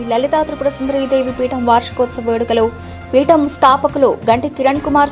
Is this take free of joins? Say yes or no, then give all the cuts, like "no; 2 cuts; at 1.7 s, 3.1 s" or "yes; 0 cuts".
yes; 0 cuts